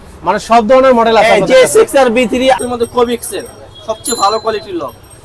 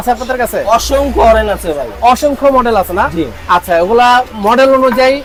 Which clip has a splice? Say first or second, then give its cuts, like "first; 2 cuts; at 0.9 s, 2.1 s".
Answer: first; 1 cut; at 2.6 s